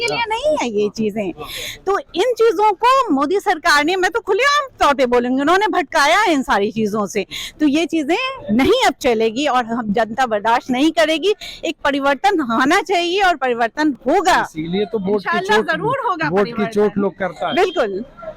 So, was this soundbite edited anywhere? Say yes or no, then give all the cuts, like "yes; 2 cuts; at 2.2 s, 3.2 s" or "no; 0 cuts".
no; 0 cuts